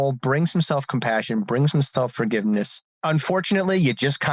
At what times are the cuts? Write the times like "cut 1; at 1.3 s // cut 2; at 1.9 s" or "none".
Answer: cut 1; at 2.8 s